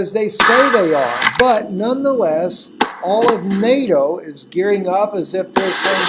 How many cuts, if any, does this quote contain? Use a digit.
1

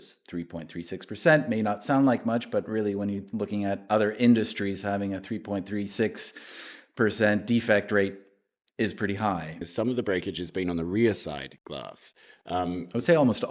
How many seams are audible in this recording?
1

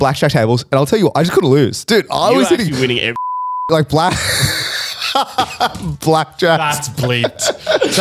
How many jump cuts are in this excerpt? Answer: 0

